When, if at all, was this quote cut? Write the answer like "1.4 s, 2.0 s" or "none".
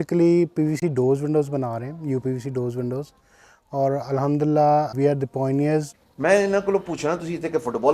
4.9 s, 5.9 s